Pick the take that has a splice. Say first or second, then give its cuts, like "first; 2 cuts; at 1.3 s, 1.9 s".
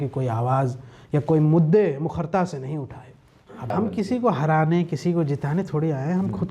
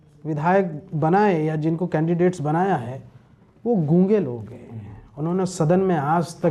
first; 1 cut; at 3.7 s